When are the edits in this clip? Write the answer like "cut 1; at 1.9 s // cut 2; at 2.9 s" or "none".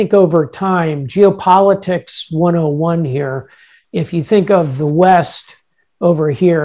none